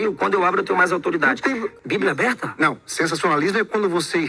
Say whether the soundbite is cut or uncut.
cut